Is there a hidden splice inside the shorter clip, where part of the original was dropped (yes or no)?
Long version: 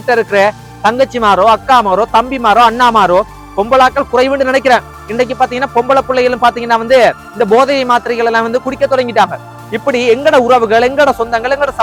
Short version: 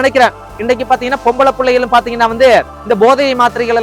no